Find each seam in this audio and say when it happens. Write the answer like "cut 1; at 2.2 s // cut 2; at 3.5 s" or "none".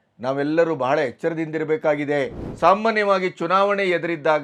cut 1; at 2.4 s